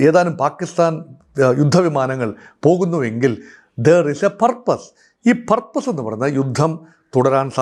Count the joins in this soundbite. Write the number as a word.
zero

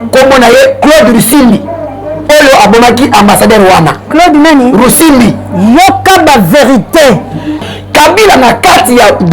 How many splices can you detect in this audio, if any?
one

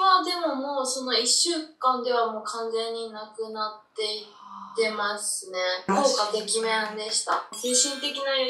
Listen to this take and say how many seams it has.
two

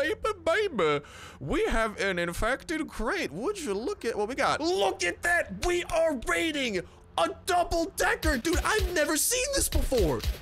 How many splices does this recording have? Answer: one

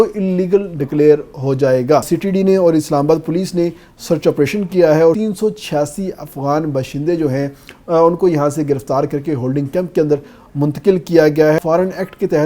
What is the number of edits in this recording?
three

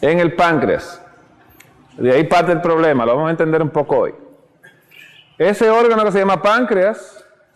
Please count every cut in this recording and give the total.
one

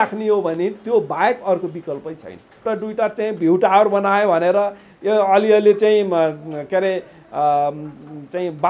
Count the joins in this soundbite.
one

